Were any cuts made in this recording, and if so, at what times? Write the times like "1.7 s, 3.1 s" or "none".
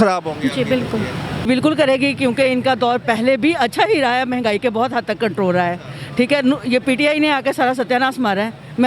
1.5 s